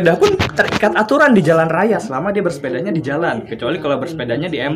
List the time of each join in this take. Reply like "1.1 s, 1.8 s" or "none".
none